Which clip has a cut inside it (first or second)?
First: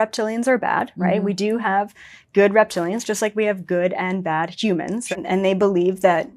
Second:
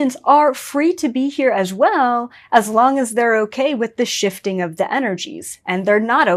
first